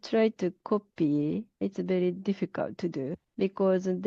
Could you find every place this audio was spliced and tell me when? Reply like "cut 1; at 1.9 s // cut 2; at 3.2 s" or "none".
cut 1; at 1.6 s // cut 2; at 3.2 s